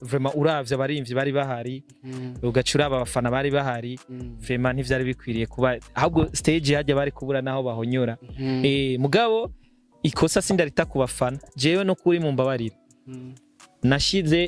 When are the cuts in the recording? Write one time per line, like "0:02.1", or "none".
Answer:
0:11.5